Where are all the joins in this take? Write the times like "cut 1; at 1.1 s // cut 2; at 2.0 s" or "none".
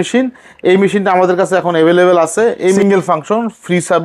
cut 1; at 2.8 s